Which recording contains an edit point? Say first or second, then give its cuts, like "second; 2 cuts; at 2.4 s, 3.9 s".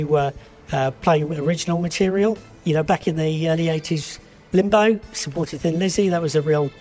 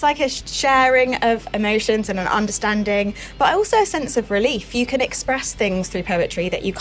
first; 1 cut; at 2.5 s